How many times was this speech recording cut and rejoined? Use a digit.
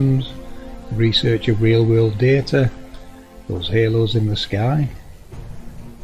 0